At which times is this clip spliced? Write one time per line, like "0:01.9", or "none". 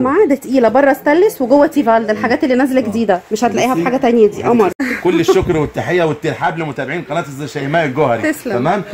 0:04.8